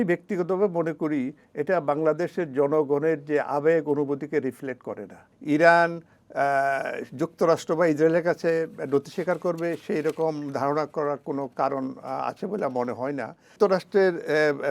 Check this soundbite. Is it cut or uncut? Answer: cut